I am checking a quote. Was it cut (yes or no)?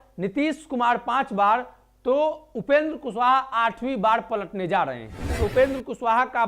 yes